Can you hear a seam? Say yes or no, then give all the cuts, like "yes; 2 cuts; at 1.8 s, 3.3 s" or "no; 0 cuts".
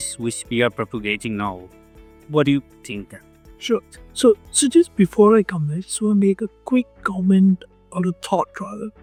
no; 0 cuts